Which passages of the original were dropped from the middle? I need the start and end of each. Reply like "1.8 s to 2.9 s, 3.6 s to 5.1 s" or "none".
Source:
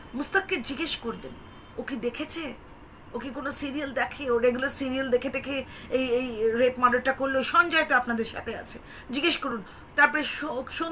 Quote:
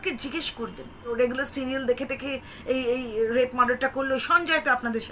1.5 s to 4.3 s